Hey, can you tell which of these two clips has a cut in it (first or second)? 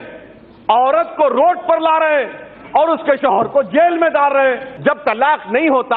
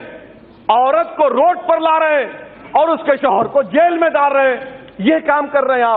first